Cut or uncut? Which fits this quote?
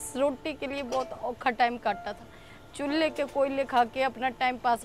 uncut